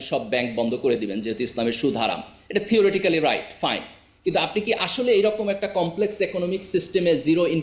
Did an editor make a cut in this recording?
no; 0 cuts

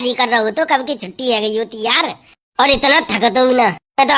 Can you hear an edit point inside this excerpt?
no; 0 cuts

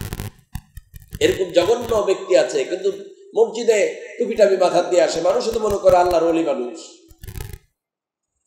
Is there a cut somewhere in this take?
no; 0 cuts

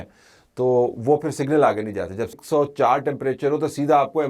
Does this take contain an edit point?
yes; 1 cut; at 2.4 s

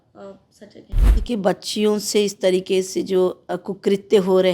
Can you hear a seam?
yes; 1 cut; at 1.0 s

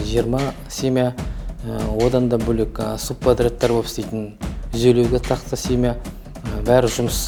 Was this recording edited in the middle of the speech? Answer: no; 0 cuts

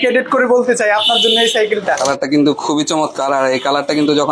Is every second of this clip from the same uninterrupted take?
no; 1 cut; at 2.0 s

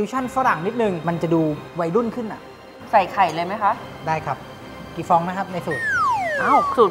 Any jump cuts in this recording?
yes; 2 cuts; at 1.0 s, 2.7 s

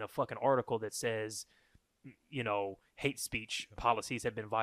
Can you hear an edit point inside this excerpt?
no; 0 cuts

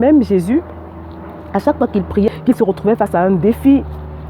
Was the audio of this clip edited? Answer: yes; 1 cut; at 2.3 s

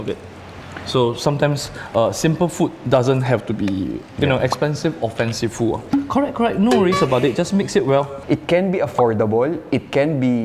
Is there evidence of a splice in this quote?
yes; 1 cut; at 8.1 s

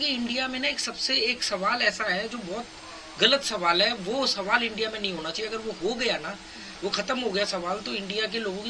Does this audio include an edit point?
no; 0 cuts

